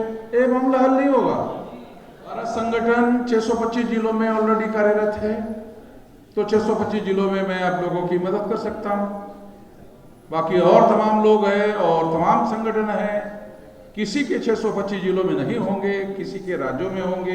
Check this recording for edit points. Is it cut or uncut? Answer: cut